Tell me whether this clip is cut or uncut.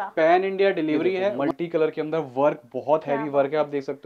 cut